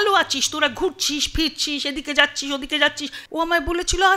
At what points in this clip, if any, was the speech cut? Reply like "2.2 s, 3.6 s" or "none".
3.1 s